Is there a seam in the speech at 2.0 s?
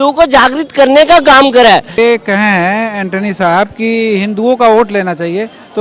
yes; 1 cut; at 2.0 s

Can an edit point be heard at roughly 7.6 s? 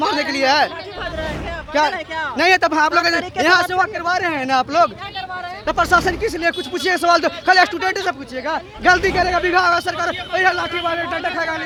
no; 0 cuts

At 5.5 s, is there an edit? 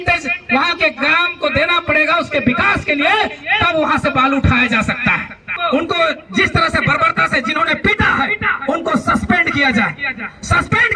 yes; 1 cut; at 5.5 s

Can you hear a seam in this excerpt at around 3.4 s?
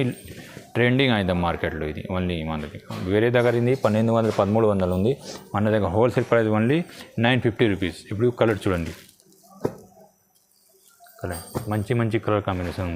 no; 0 cuts

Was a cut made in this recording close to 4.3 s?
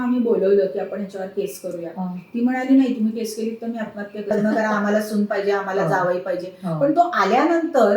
yes; 1 cut; at 4.3 s

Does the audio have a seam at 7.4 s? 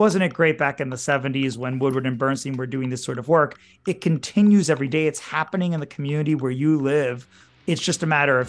yes; 1 cut; at 7.4 s

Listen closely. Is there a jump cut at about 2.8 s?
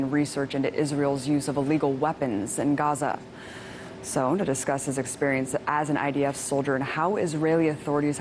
no; 1 cut; at 4.8 s

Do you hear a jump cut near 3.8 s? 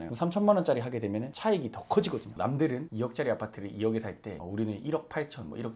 no; 1 cut; at 2.3 s

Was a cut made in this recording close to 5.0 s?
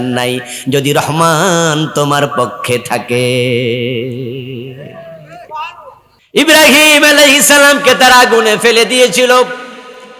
no; 1 cut; at 6.4 s

